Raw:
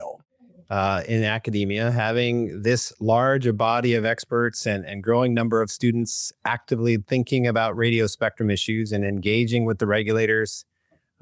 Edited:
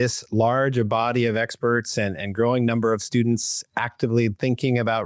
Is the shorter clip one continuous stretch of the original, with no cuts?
yes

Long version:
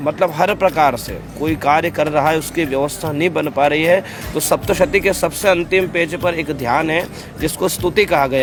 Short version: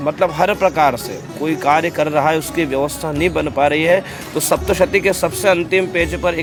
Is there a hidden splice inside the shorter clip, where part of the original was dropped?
no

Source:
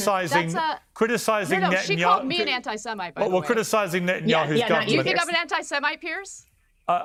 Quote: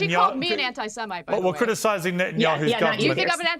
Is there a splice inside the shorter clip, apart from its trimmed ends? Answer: no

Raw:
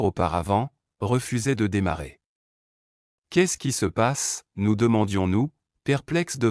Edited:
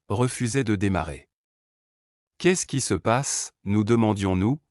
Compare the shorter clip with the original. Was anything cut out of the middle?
no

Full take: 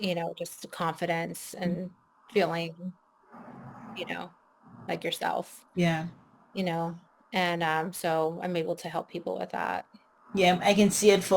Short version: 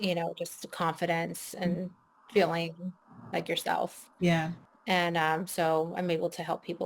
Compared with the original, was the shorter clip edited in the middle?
yes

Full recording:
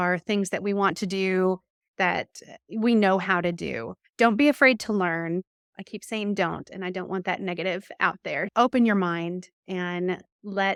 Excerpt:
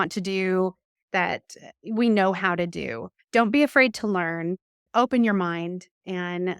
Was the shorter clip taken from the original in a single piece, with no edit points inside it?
no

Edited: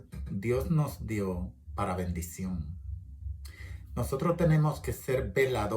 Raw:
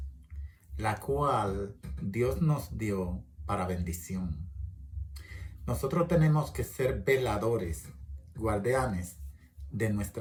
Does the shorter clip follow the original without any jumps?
yes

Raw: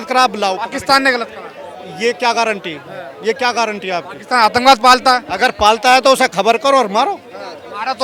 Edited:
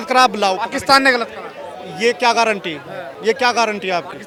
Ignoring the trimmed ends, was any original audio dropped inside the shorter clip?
no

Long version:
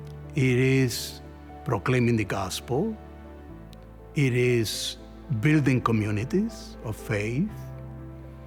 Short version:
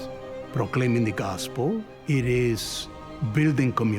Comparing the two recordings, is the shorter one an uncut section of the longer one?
no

